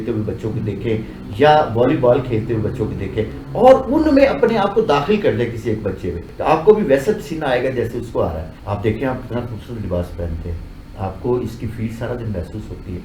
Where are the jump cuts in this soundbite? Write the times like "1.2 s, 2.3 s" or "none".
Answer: 6.3 s, 8.5 s